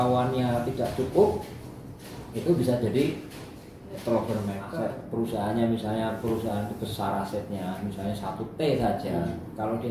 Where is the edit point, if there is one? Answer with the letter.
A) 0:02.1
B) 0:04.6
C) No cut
B